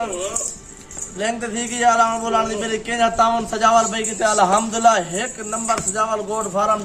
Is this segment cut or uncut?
uncut